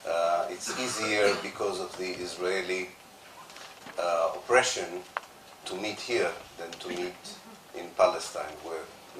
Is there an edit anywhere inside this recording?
yes; 1 cut; at 1.1 s

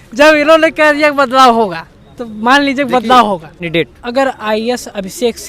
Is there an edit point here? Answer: yes; 1 cut; at 3.5 s

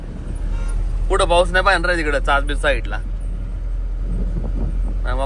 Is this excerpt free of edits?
yes; 0 cuts

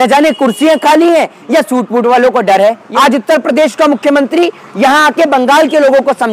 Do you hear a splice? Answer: yes; 1 cut; at 2.8 s

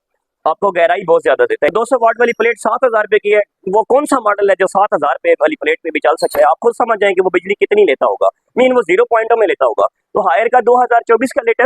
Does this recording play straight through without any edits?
no; 1 cut; at 1.7 s

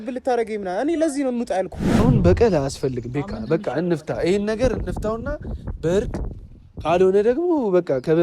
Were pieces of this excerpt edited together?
yes; 1 cut; at 2.0 s

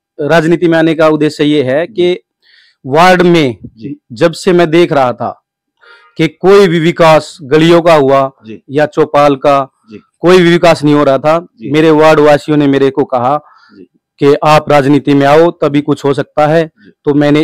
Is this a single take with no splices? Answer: yes; 0 cuts

